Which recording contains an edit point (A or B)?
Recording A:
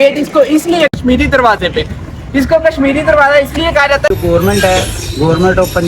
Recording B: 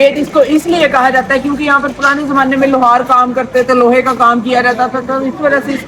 A